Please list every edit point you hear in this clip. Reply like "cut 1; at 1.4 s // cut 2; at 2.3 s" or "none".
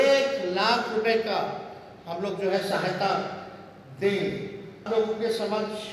none

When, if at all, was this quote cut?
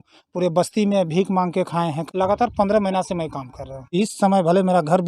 cut 1; at 2.0 s // cut 2; at 3.9 s

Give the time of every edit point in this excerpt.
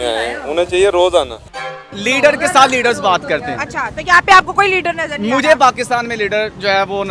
cut 1; at 1.8 s // cut 2; at 5.4 s

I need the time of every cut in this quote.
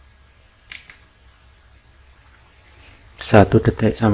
cut 1; at 2.2 s

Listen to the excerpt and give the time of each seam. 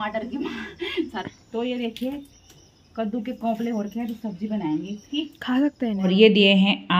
cut 1; at 1.2 s // cut 2; at 6.1 s

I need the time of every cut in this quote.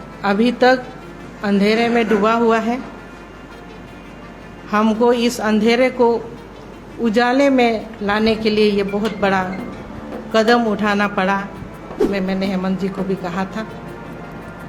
cut 1; at 12.1 s

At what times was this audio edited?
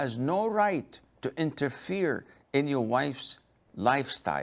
none

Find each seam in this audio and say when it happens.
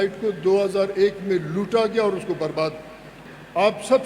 cut 1; at 3.1 s

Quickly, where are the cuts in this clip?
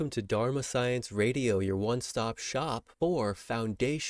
cut 1; at 2.9 s

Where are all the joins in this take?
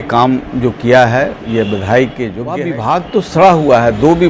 cut 1; at 2.5 s

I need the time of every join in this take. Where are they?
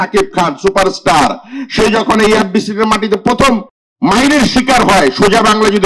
cut 1; at 3.8 s

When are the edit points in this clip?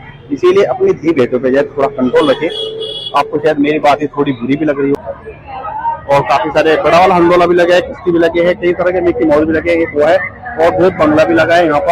cut 1; at 5.0 s

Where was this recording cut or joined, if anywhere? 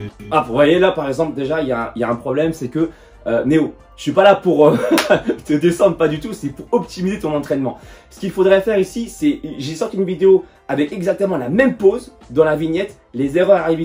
none

